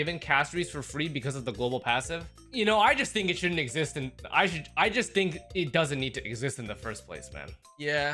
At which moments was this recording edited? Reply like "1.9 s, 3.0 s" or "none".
none